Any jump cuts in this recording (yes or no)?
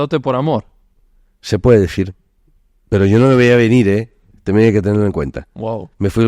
no